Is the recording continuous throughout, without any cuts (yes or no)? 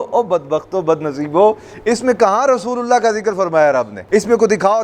yes